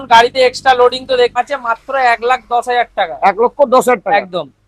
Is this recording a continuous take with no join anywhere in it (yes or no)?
no